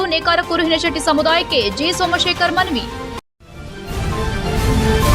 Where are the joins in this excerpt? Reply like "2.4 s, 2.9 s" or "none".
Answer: 3.2 s